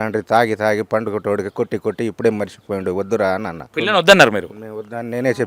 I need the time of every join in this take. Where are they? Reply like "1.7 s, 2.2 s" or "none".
3.7 s